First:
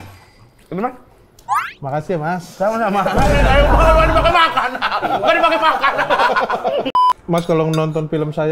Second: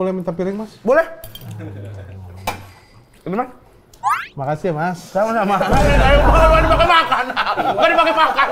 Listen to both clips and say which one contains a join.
first; 1 cut; at 6.9 s

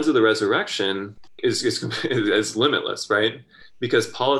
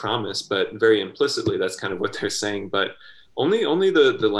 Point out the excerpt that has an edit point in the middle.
first; 1 cut; at 1.2 s

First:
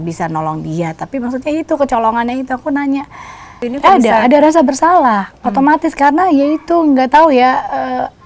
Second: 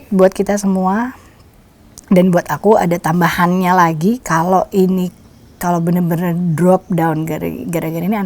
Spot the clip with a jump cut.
first; 1 cut; at 3.6 s

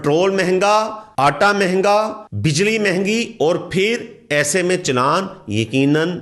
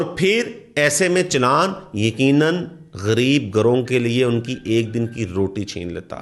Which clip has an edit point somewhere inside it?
first; 2 cuts; at 1.0 s, 2.2 s

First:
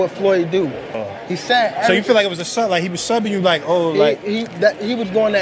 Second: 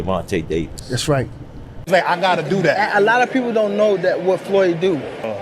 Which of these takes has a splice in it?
second; 1 cut; at 1.9 s

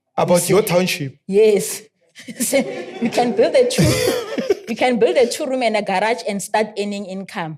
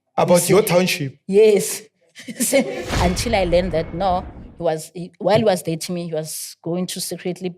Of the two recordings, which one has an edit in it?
second; 1 cut; at 2.9 s

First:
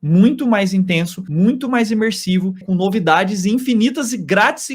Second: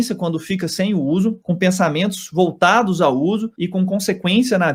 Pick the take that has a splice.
first; 1 cut; at 2.6 s

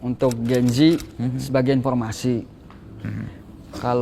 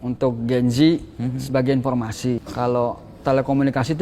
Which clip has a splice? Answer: second; 1 cut; at 2.5 s

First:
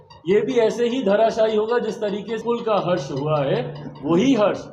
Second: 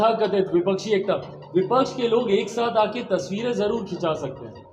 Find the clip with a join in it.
first; 1 cut; at 2.4 s

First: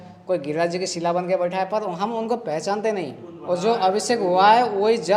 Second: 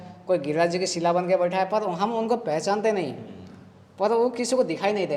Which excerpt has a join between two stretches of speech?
first; 1 cut; at 3.3 s

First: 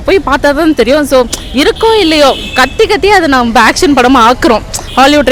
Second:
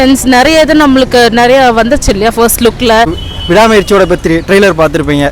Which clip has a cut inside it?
second; 1 cut; at 3.2 s

